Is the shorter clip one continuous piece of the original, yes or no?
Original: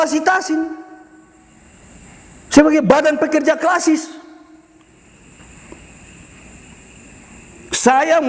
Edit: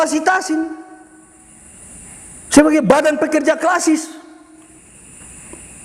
no